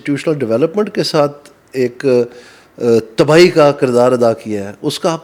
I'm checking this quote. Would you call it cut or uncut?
uncut